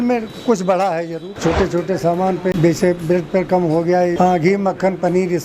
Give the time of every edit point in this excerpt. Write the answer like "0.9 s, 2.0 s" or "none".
1.3 s, 2.5 s, 4.1 s